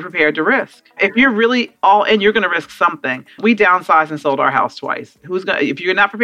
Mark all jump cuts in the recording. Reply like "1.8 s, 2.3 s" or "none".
1.0 s, 3.4 s

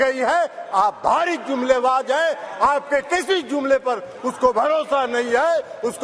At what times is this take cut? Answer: none

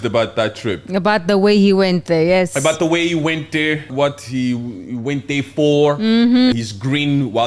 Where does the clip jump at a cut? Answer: 3.9 s, 6.5 s

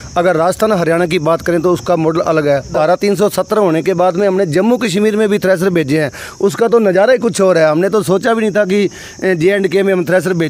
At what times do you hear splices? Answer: 2.7 s

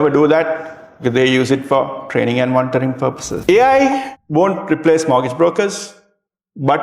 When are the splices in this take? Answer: 3.3 s, 4.1 s

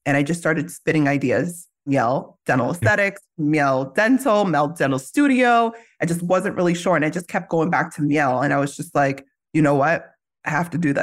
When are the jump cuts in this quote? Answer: 1.9 s

